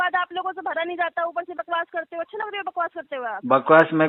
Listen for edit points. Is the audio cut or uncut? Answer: uncut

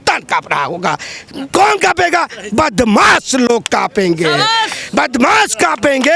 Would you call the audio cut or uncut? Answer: uncut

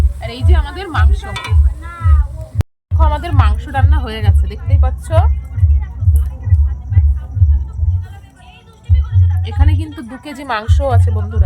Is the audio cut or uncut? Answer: cut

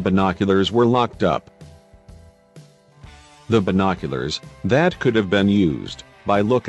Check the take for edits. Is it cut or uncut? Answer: uncut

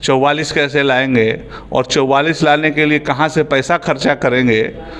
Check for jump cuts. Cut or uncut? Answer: uncut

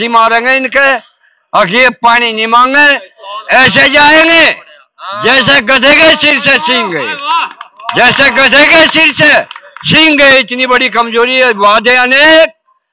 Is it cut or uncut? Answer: uncut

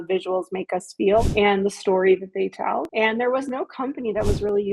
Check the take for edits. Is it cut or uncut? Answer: cut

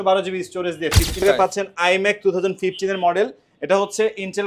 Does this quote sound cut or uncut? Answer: cut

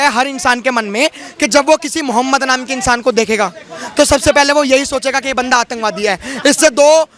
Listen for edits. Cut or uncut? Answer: uncut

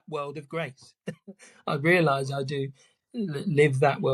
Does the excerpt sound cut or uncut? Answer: uncut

